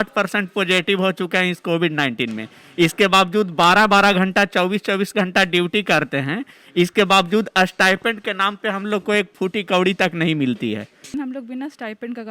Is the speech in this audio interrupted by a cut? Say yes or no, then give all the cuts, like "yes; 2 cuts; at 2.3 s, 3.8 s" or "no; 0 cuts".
yes; 1 cut; at 11.0 s